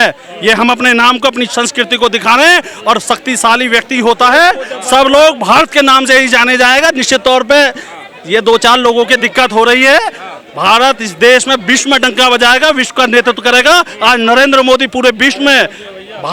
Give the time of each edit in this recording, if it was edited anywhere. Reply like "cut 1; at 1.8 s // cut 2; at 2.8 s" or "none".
none